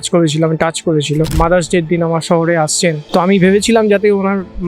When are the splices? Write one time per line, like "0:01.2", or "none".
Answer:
0:01.3
0:03.0